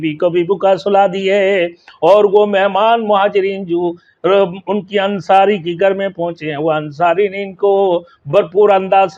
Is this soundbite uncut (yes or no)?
yes